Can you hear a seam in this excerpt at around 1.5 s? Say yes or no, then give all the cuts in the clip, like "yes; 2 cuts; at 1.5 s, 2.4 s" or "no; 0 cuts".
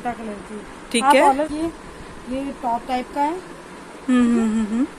yes; 1 cut; at 1.5 s